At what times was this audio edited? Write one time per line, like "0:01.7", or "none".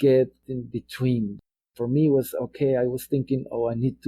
0:01.4